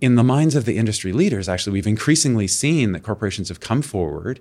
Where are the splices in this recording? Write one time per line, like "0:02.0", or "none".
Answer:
none